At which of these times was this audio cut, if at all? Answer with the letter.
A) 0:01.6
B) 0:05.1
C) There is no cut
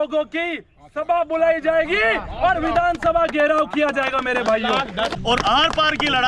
B